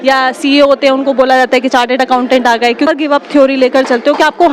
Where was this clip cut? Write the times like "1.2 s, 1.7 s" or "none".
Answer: 2.9 s